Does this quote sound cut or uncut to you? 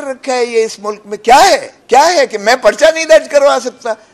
cut